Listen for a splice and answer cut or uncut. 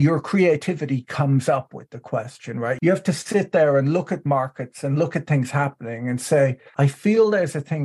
cut